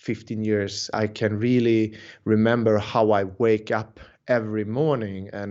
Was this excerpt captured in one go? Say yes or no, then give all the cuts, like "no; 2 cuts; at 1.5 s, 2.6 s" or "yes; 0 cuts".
no; 1 cut; at 0.9 s